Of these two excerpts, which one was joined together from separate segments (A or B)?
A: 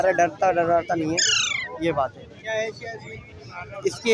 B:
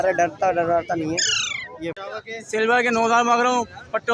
B